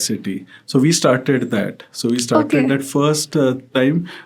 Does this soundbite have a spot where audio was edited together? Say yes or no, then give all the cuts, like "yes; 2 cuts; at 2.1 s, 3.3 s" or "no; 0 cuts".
no; 0 cuts